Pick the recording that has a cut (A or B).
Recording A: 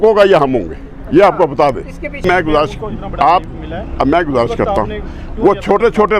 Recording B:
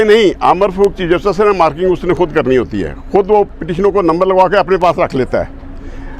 A